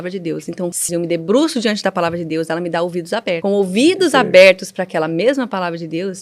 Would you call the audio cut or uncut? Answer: cut